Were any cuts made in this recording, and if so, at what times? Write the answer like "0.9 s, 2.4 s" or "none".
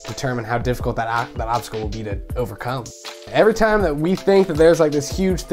2.8 s